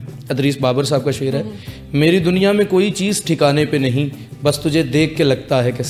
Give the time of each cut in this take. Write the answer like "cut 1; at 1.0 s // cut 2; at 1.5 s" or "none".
none